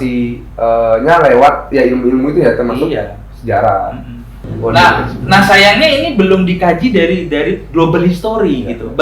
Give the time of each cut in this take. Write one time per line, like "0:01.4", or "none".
0:04.4